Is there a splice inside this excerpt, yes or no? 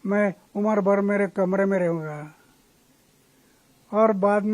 no